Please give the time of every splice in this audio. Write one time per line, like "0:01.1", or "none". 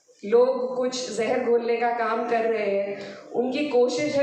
none